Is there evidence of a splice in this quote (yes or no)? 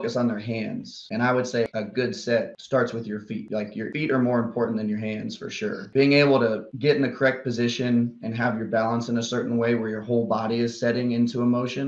yes